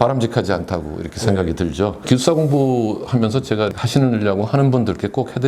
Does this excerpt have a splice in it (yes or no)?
yes